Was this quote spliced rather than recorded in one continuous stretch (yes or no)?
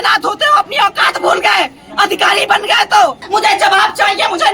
yes